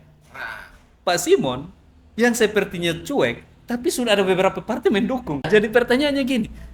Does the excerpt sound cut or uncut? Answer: cut